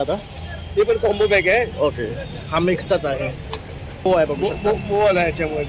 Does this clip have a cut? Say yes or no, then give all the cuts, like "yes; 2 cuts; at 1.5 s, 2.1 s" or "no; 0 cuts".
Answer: yes; 1 cut; at 4.0 s